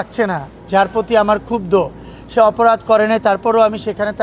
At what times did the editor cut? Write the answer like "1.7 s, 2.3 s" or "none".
none